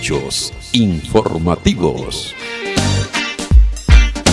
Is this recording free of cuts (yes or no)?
yes